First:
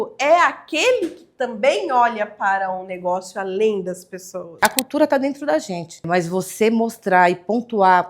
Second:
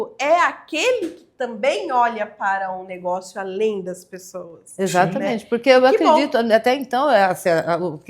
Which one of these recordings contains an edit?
first; 2 cuts; at 4.6 s, 6.0 s

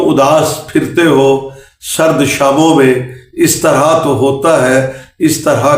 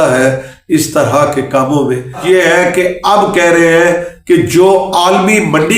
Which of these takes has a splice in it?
second; 1 cut; at 2.2 s

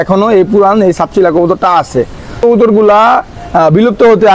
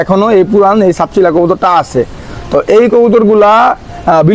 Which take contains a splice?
first; 1 cut; at 2.4 s

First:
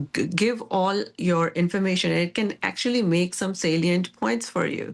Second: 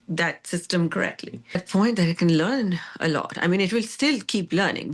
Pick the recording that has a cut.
second; 1 cut; at 1.6 s

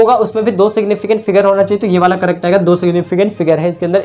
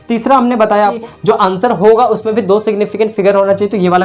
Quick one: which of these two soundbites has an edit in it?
second; 1 cut; at 1.0 s

